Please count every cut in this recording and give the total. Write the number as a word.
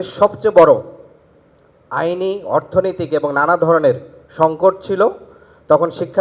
zero